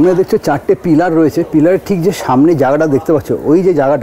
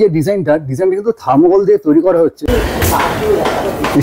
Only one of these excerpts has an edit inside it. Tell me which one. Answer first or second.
second